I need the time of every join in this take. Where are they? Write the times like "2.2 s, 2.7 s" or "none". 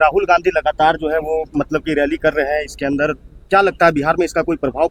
none